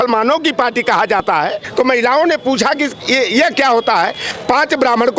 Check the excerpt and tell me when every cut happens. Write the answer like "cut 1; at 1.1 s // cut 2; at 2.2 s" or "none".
cut 1; at 1.2 s // cut 2; at 4.3 s